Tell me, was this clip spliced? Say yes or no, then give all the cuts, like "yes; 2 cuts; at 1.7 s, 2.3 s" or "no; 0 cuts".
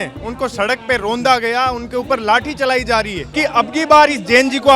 yes; 1 cut; at 3.2 s